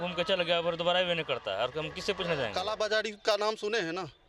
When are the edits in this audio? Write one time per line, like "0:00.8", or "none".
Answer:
0:02.6